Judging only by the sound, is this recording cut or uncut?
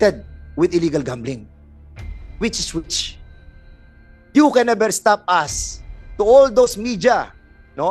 uncut